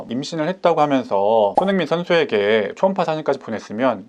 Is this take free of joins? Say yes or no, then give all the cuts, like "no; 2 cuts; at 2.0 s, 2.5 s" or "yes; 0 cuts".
yes; 0 cuts